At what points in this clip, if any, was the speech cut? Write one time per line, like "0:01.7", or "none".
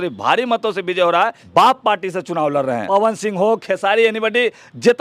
0:01.4
0:02.8